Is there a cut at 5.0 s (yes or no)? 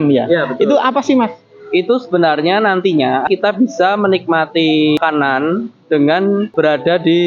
yes